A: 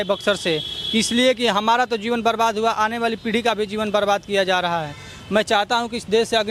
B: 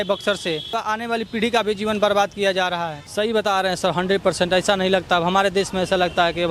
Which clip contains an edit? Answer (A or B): B